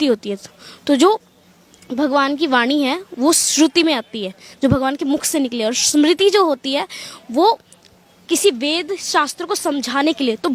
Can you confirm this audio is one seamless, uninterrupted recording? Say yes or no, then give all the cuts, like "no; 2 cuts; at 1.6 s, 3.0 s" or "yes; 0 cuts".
yes; 0 cuts